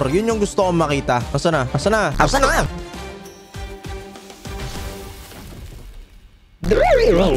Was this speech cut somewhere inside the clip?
no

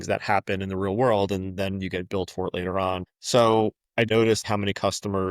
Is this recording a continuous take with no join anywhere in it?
no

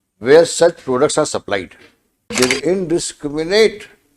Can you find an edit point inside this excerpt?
yes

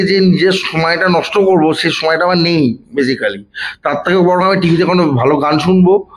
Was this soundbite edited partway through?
no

